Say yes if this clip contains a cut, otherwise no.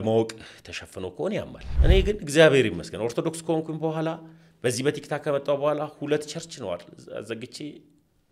yes